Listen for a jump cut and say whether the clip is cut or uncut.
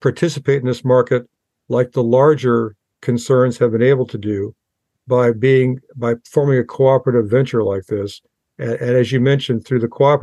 uncut